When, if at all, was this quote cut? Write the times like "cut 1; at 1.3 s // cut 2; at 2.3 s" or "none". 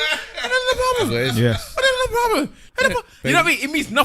cut 1; at 2.7 s